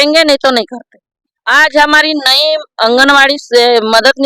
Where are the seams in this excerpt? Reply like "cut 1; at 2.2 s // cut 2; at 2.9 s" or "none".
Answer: cut 1; at 1.3 s